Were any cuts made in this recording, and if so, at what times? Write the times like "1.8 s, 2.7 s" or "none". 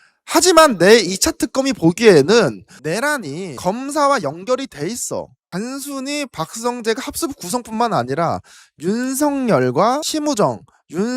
5.4 s